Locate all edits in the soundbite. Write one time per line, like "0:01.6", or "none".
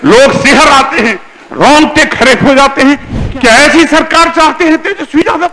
0:03.1

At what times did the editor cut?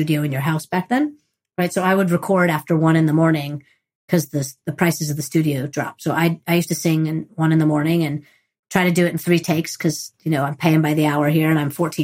none

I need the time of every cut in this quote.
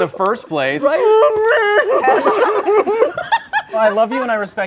0:03.8

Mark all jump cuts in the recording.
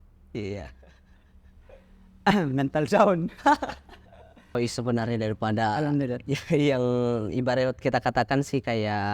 0:04.5

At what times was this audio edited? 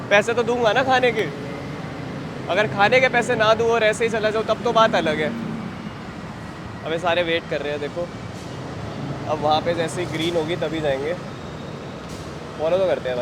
none

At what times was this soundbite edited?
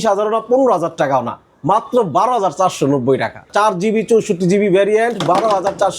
0:03.5

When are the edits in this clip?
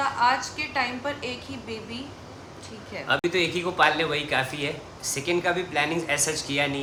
none

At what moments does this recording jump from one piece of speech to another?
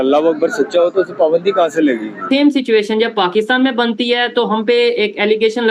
0:02.2

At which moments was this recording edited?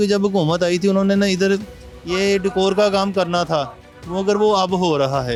none

